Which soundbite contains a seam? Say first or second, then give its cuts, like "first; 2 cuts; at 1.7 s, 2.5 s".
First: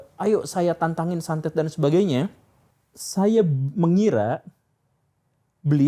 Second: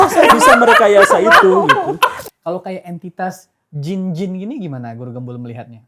second; 1 cut; at 2.2 s